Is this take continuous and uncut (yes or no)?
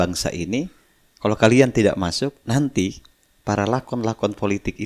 yes